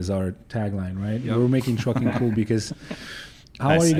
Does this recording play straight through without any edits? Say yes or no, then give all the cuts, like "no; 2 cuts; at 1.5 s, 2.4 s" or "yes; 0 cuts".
yes; 0 cuts